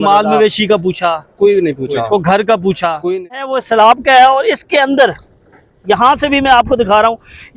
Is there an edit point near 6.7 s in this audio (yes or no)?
no